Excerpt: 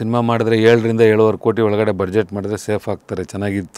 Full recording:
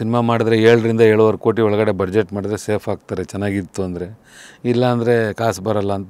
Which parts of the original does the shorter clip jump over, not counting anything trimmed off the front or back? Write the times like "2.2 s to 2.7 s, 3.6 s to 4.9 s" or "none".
none